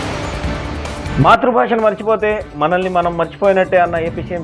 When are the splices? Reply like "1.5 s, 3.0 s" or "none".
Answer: none